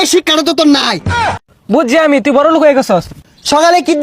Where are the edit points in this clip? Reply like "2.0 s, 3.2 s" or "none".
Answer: 1.4 s, 3.1 s